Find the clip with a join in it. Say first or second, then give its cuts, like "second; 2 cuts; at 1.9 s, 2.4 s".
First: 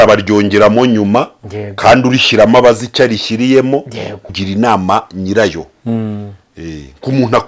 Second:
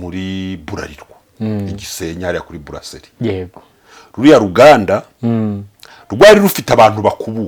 first; 1 cut; at 4.4 s